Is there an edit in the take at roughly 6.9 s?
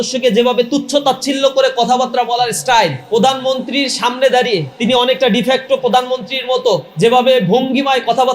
yes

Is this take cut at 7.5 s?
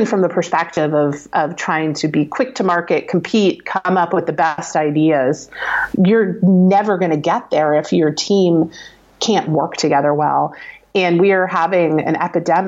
no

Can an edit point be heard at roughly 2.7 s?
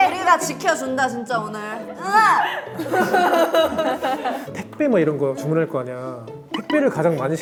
no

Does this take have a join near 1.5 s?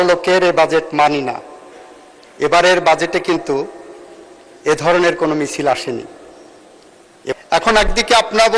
no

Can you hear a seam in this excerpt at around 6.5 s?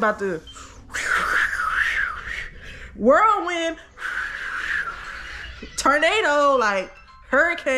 no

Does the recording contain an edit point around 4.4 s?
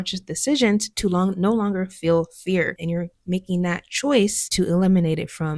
yes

